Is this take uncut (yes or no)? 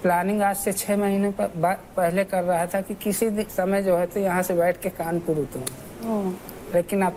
yes